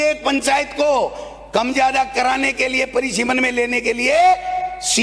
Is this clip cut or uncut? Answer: uncut